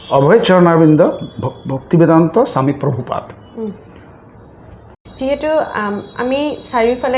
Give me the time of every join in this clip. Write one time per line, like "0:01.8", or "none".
0:05.0